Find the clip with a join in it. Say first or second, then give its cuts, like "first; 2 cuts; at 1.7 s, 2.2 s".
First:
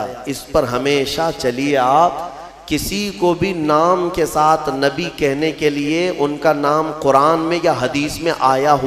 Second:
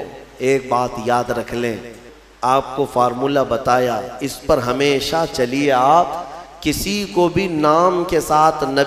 second; 1 cut; at 2.0 s